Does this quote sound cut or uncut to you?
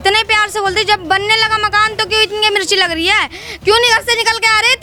uncut